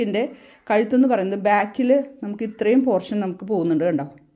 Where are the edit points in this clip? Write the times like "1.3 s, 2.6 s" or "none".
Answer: none